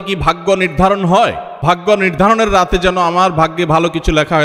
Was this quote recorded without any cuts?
yes; 0 cuts

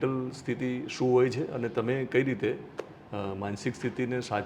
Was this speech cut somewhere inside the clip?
no; 0 cuts

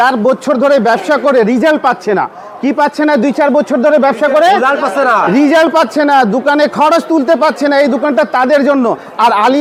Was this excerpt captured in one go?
yes; 0 cuts

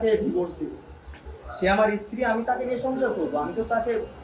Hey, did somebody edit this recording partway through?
no; 0 cuts

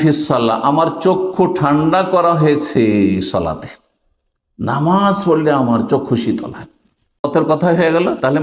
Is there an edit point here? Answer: yes; 1 cut; at 7.3 s

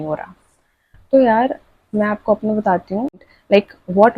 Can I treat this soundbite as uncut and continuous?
no; 1 cut; at 3.3 s

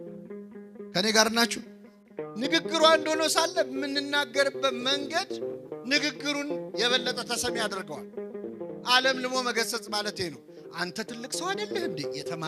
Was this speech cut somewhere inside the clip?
no; 0 cuts

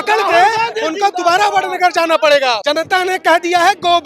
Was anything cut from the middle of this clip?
yes; 1 cut; at 2.6 s

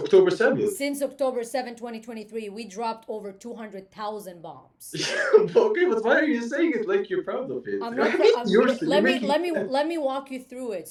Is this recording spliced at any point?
no; 0 cuts

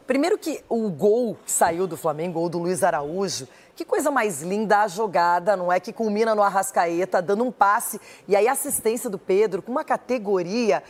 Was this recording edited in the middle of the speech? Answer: no; 0 cuts

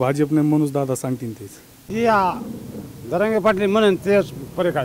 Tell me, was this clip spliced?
yes; 1 cut; at 1.9 s

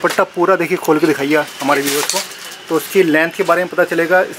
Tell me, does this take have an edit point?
no; 0 cuts

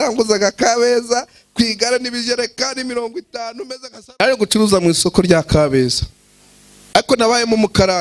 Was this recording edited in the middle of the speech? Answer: yes; 1 cut; at 4.2 s

